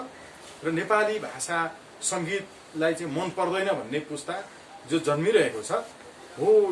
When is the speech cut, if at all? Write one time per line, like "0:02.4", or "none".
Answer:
none